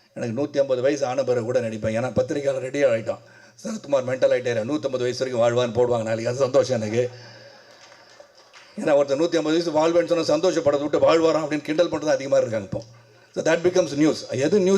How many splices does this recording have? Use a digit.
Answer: 0